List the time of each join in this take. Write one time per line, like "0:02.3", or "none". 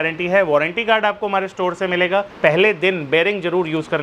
0:02.3

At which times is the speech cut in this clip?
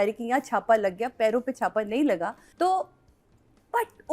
0:02.4

